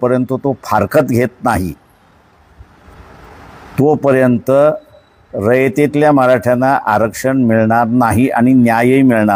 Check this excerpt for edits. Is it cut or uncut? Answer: uncut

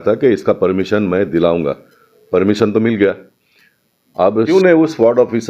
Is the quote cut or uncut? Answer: cut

